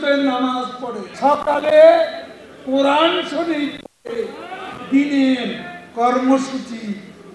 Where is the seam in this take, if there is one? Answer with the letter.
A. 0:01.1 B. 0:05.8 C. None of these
A